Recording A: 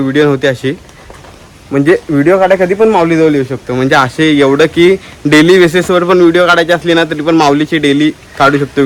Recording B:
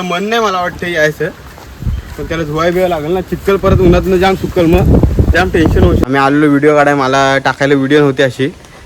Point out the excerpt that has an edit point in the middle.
B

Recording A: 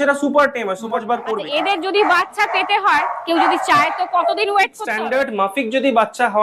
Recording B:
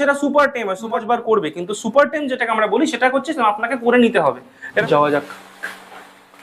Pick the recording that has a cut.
A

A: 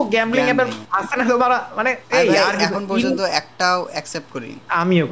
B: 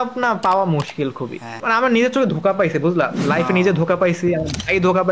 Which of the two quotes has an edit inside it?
B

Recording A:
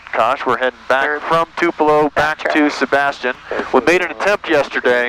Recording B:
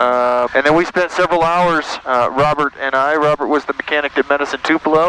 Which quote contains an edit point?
A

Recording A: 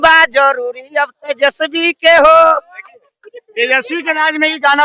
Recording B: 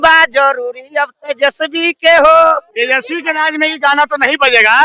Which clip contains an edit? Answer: B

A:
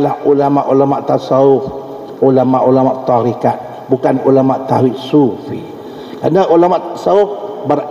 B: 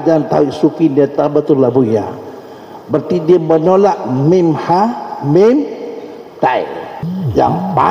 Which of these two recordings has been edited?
B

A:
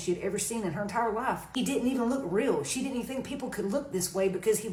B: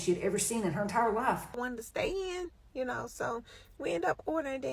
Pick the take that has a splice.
B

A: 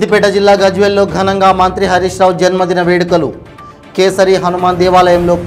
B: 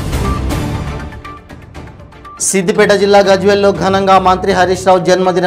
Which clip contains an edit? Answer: B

